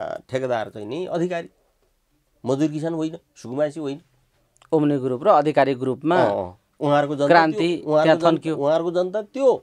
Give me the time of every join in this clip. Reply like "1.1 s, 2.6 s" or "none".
none

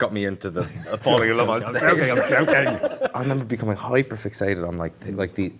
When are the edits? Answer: 3.1 s

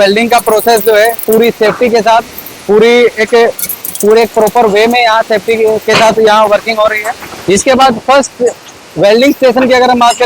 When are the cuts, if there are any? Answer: 7.3 s

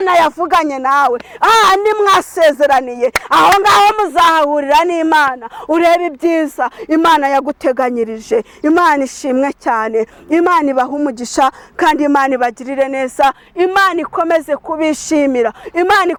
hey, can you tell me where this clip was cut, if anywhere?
none

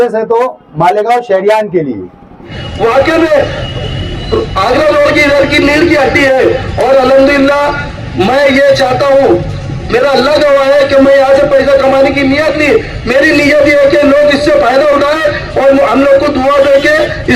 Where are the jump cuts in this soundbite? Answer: 2.6 s

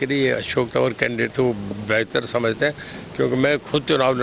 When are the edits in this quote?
none

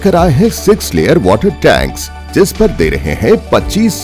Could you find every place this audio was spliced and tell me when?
none

